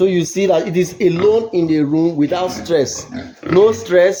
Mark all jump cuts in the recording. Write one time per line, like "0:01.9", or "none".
none